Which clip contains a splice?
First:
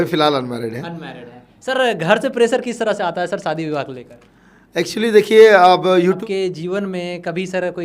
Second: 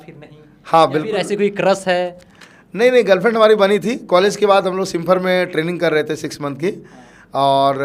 first; 1 cut; at 6.2 s

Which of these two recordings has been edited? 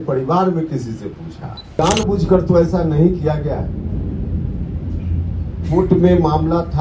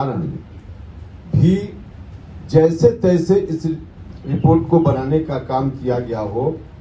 first; 1 cut; at 1.8 s

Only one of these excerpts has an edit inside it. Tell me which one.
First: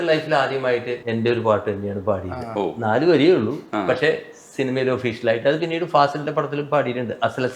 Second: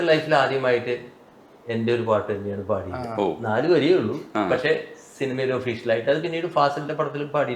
first; 1 cut; at 1.0 s

